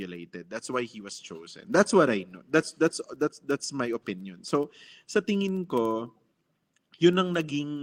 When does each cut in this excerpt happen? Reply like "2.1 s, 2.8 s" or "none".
none

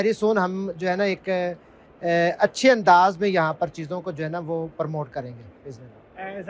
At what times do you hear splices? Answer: none

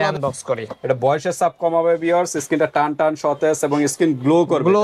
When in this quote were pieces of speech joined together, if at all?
none

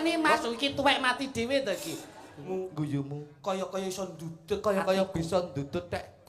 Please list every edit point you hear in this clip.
2.4 s

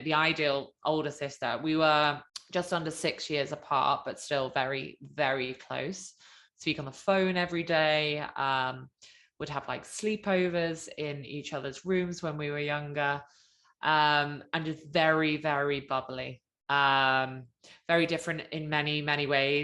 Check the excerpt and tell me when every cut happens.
2.3 s

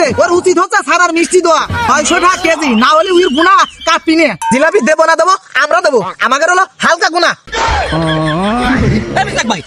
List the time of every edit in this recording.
none

